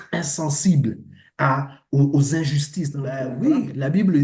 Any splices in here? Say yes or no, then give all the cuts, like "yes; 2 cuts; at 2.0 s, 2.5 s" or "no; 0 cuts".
yes; 1 cut; at 3.3 s